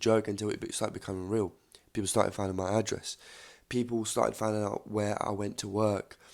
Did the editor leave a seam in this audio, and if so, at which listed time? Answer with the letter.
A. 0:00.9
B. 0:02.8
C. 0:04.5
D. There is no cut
D